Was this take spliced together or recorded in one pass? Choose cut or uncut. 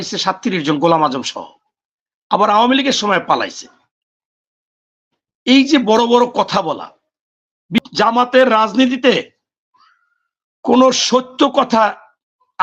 cut